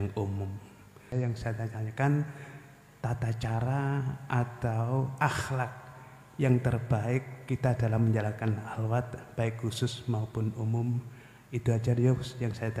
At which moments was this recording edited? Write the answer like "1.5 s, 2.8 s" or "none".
1.1 s